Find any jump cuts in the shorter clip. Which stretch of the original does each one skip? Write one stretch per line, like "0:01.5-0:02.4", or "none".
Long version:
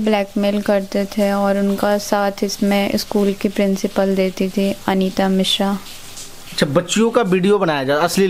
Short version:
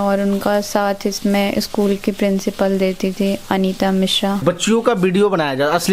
0:05.8-0:06.7